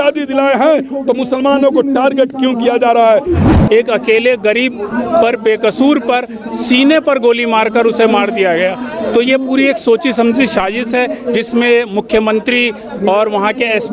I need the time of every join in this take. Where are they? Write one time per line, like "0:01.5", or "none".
0:03.5